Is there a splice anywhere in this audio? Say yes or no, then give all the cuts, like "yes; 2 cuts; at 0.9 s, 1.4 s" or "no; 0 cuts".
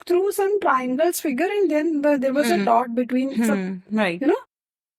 no; 0 cuts